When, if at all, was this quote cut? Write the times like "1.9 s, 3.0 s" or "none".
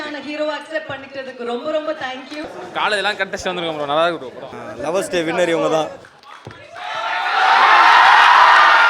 2.5 s, 4.5 s, 6.2 s